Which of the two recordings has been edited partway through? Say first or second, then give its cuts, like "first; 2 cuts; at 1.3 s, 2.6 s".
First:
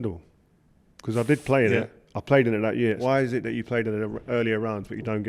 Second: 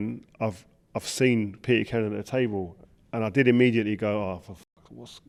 first; 1 cut; at 3.0 s